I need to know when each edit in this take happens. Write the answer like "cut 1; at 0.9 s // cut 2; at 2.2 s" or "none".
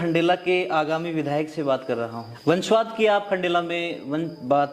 cut 1; at 2.3 s

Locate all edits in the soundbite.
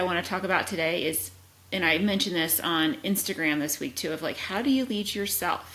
none

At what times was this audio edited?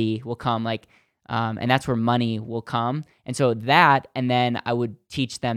none

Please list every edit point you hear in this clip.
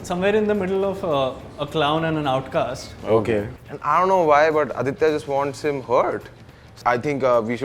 cut 1; at 3.5 s // cut 2; at 6.7 s

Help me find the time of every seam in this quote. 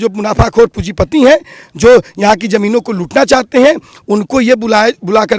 none

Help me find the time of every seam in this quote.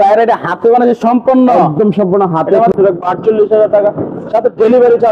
cut 1; at 2.7 s

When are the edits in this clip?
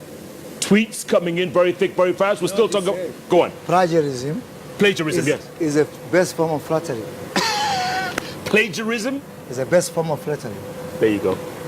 cut 1; at 1.0 s

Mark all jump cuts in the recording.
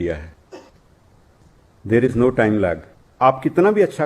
cut 1; at 3.0 s

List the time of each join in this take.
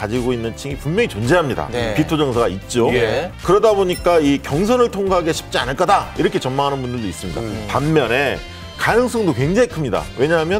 none

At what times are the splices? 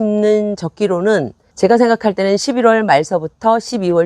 cut 1; at 1.4 s

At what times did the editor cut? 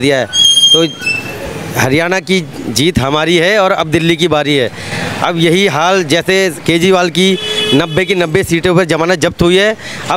none

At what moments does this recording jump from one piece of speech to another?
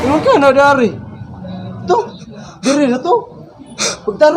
cut 1; at 1.1 s

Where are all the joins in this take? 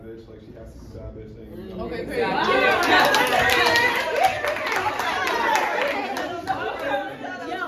none

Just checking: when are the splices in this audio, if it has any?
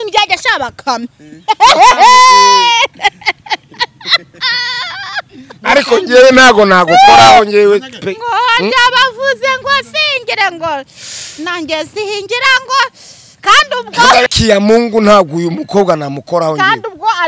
cut 1; at 14.3 s

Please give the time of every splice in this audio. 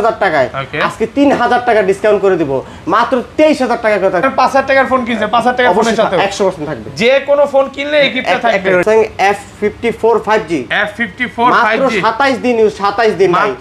cut 1; at 4.3 s // cut 2; at 8.8 s

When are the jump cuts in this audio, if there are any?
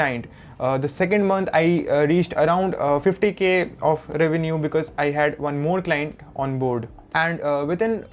cut 1; at 7.0 s

